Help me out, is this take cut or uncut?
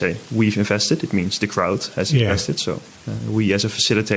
uncut